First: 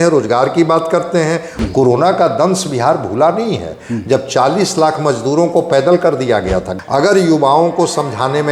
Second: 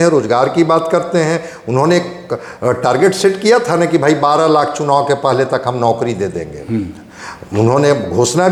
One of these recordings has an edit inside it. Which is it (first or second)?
first